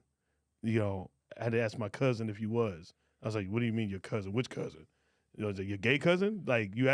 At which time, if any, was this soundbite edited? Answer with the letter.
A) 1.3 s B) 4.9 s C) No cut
A